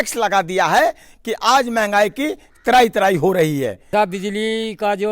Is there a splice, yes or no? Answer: yes